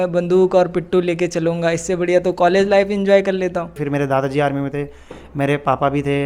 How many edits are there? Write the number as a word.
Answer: one